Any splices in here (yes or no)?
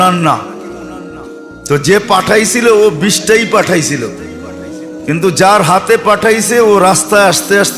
no